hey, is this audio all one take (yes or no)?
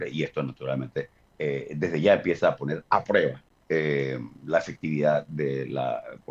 no